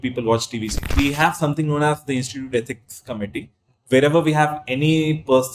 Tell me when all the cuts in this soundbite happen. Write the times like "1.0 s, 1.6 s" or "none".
0.9 s